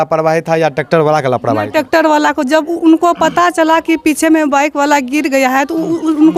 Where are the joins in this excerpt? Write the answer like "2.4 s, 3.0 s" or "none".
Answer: none